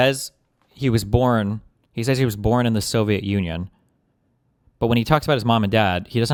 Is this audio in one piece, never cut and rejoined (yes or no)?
yes